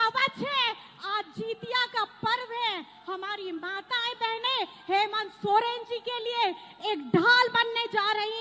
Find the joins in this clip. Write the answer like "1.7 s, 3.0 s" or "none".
none